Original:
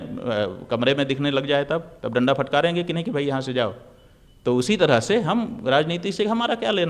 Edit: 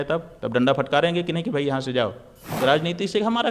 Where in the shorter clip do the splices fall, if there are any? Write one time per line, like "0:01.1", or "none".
0:02.5